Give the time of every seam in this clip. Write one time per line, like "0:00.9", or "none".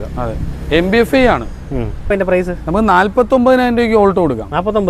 0:02.1